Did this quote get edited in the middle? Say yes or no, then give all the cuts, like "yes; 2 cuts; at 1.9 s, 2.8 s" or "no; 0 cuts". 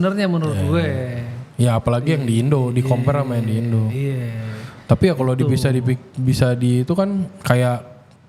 no; 0 cuts